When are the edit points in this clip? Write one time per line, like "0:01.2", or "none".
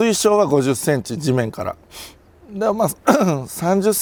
none